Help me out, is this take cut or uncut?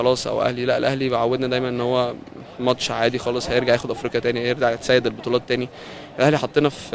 uncut